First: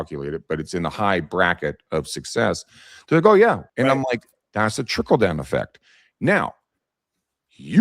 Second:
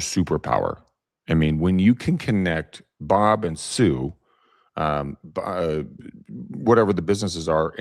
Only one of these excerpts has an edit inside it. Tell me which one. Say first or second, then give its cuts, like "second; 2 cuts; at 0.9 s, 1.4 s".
first; 1 cut; at 3.6 s